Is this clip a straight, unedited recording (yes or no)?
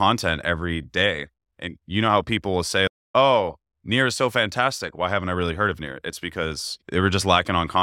no